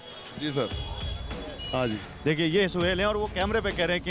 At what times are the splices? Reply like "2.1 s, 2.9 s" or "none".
none